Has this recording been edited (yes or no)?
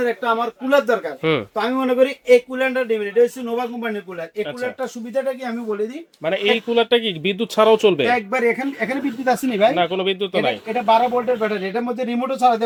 no